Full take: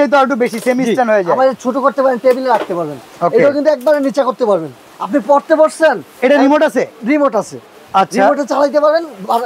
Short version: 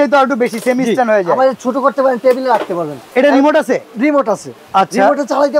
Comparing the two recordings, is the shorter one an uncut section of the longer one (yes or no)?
no